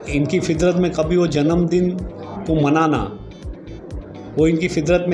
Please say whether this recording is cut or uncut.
uncut